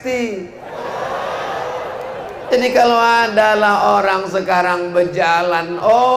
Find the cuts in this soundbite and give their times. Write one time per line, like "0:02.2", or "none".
none